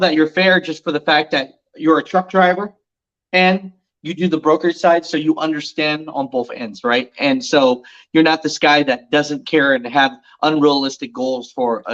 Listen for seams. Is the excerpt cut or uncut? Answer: uncut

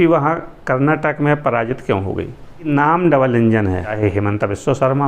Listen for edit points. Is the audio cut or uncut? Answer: cut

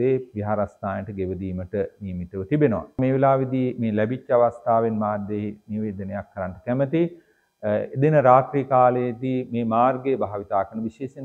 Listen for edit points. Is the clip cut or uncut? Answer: cut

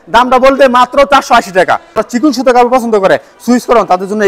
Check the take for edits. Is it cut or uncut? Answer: cut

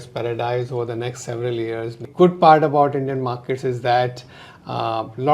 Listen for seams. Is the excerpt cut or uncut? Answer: cut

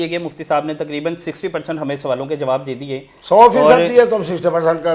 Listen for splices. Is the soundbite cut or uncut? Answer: uncut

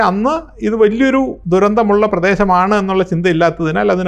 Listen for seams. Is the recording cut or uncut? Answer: uncut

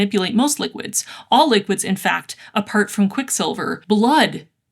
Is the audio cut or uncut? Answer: cut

